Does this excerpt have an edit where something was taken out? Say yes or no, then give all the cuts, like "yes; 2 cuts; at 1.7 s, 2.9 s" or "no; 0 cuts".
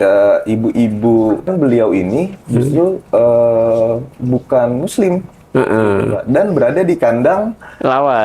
yes; 1 cut; at 1.5 s